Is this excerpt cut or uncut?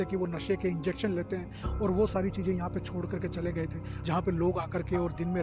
cut